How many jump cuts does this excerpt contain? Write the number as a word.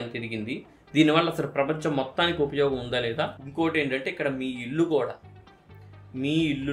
one